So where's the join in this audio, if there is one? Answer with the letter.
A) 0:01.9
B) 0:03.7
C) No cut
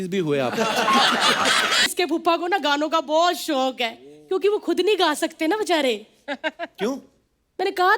A